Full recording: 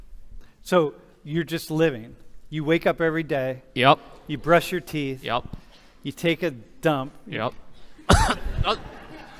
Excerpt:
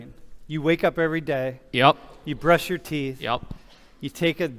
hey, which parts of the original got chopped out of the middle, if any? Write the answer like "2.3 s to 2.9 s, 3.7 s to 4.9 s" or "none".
none